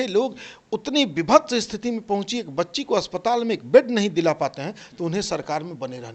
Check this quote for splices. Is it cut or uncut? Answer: uncut